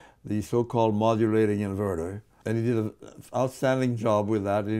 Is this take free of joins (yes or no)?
no